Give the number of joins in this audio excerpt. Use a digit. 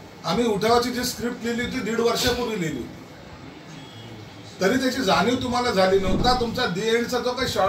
1